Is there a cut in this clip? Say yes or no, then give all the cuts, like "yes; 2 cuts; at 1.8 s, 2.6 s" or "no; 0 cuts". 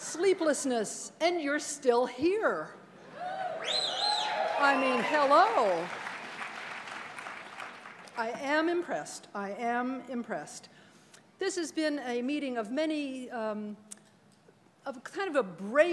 no; 0 cuts